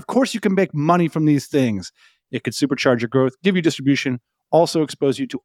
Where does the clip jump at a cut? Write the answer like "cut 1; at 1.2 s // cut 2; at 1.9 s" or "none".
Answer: cut 1; at 2.2 s